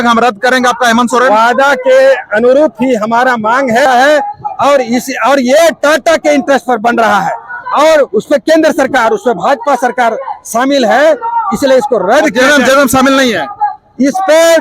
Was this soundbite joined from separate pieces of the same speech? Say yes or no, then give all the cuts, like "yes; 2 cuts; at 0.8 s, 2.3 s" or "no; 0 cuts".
yes; 1 cut; at 3.9 s